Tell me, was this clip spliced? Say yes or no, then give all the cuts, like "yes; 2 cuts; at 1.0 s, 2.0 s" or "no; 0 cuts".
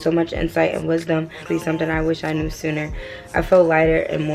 yes; 1 cut; at 1.4 s